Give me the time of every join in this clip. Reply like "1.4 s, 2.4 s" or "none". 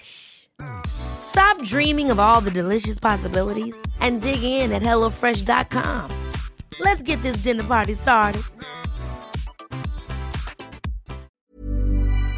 11.3 s